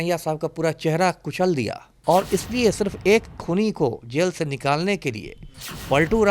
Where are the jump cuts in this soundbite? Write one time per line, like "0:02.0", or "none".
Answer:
0:01.9